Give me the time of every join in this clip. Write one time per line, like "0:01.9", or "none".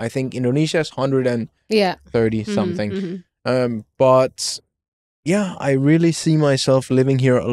none